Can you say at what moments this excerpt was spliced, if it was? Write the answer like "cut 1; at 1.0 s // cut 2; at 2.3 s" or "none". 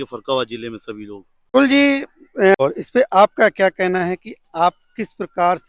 none